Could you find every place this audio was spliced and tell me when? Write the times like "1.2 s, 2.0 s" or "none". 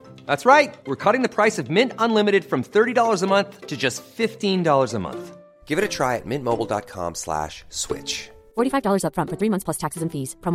none